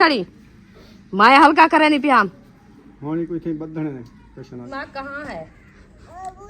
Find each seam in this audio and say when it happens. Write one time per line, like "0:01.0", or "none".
0:04.7